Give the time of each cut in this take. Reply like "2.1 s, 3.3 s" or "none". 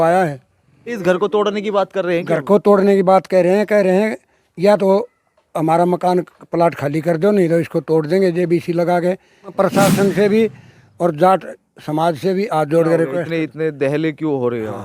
1.0 s, 9.5 s